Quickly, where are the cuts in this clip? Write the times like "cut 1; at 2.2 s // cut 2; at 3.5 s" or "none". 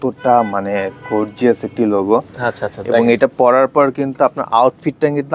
none